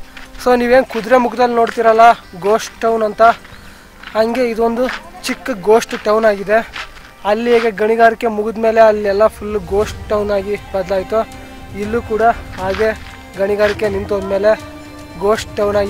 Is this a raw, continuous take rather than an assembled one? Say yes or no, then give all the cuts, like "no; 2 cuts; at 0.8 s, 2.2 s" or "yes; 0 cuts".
yes; 0 cuts